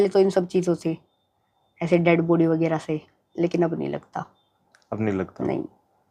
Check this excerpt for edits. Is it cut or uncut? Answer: uncut